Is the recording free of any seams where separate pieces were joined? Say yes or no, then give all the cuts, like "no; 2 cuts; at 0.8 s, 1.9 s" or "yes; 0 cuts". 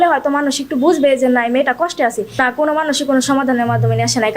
no; 1 cut; at 2.3 s